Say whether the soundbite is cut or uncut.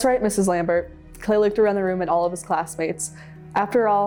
uncut